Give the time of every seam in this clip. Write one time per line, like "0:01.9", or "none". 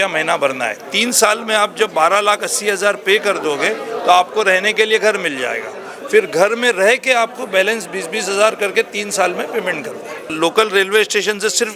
0:10.3